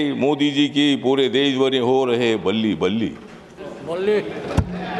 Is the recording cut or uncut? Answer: uncut